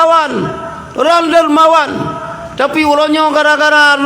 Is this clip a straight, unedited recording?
yes; 0 cuts

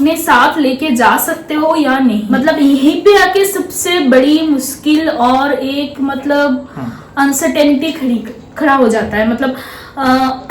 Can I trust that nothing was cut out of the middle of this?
no; 1 cut; at 2.3 s

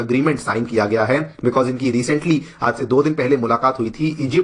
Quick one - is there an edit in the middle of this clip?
no; 0 cuts

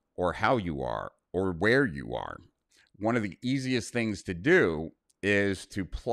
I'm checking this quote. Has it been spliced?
no; 0 cuts

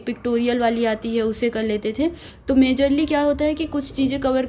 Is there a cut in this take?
no; 0 cuts

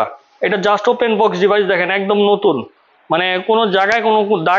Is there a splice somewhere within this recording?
no; 0 cuts

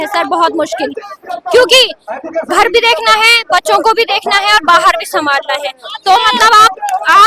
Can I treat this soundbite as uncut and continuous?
yes; 0 cuts

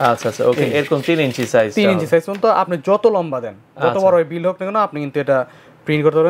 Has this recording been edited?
no; 0 cuts

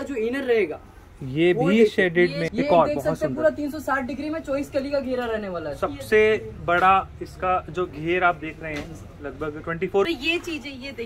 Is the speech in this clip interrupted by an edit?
yes; 2 cuts; at 2.4 s, 10.1 s

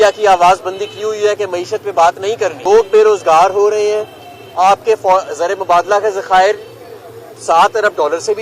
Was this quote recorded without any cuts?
no; 1 cut; at 2.6 s

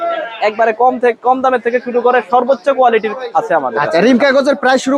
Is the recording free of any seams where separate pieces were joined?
yes; 0 cuts

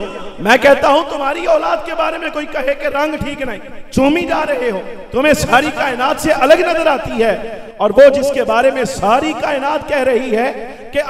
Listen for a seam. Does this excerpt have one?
no; 0 cuts

